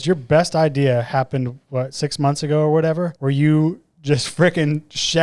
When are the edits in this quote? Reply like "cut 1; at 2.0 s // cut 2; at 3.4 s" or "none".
cut 1; at 3.1 s